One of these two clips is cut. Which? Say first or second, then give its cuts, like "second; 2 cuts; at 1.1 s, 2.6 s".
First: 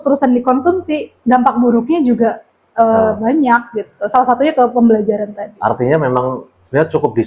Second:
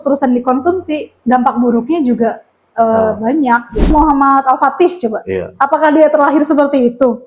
second; 1 cut; at 3.9 s